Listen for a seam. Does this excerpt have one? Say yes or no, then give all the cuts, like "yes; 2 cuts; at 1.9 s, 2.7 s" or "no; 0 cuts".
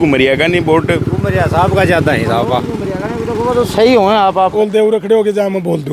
yes; 1 cut; at 4.5 s